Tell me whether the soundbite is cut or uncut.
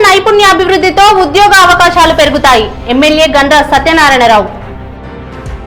uncut